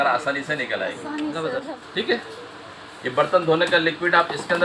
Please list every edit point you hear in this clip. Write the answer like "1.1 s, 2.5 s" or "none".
1.7 s